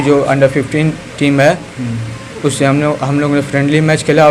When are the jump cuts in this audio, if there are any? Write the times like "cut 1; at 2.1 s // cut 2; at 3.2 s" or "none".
none